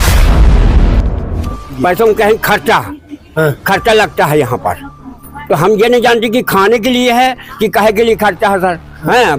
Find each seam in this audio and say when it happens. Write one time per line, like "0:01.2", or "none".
0:01.7